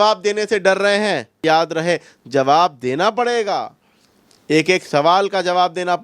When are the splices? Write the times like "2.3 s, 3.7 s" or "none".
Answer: 1.4 s